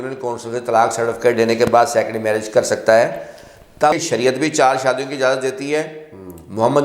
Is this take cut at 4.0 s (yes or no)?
yes